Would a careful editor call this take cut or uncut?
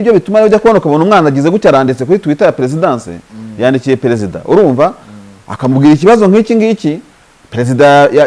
uncut